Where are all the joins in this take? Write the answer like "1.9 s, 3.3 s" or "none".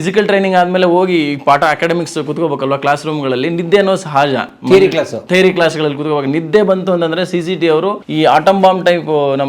8.0 s